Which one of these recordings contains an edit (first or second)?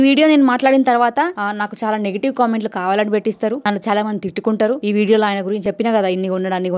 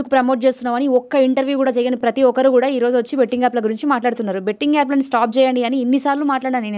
first